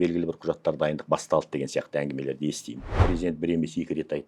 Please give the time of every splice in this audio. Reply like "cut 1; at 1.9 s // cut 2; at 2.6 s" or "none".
cut 1; at 3.0 s

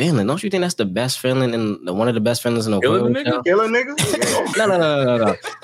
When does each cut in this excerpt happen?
cut 1; at 4.5 s

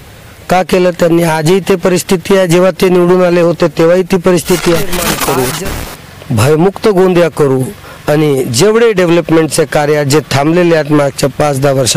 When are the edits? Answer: cut 1; at 5.1 s

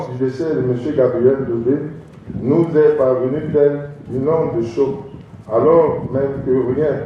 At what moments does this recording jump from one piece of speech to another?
none

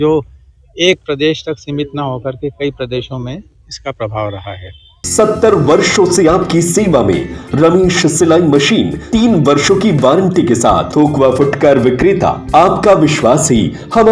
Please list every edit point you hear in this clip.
cut 1; at 5.1 s // cut 2; at 9.0 s // cut 3; at 10.9 s // cut 4; at 12.4 s

